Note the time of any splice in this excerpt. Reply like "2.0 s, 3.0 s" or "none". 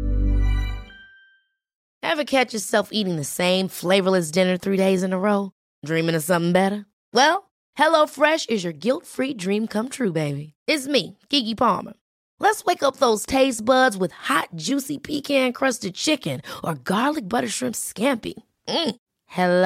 1.8 s